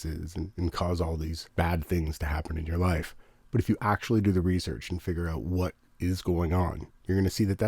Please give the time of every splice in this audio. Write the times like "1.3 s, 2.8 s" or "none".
1.4 s